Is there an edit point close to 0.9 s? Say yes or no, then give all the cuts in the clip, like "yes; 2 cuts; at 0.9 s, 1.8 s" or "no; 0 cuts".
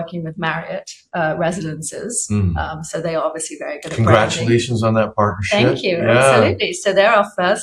no; 0 cuts